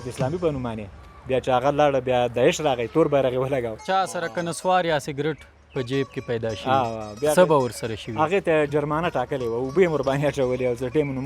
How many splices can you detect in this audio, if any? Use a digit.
1